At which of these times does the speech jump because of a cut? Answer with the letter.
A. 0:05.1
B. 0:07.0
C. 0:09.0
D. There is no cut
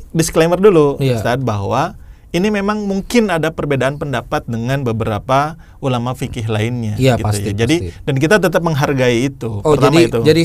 D